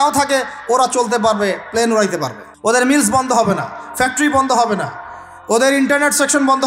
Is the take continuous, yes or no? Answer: no